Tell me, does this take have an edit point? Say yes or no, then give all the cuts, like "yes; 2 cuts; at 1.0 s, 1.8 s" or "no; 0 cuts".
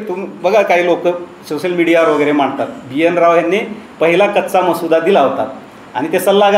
no; 0 cuts